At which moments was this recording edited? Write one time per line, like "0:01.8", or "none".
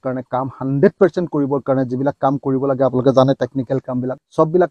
none